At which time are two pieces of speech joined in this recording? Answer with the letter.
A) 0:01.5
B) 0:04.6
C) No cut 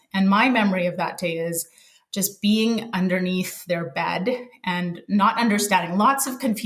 C